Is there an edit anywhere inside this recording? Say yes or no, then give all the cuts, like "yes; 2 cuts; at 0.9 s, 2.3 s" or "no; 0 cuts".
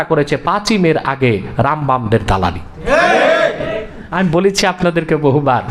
yes; 1 cut; at 4.0 s